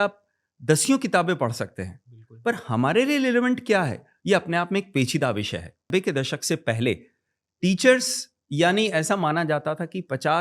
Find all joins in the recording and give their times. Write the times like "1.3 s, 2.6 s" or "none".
5.8 s